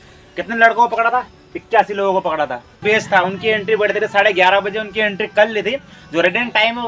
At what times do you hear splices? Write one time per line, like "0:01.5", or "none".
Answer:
0:02.8